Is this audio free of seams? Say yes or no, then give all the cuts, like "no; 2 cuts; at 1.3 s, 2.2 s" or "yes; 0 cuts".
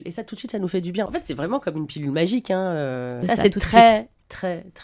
no; 2 cuts; at 1.1 s, 3.1 s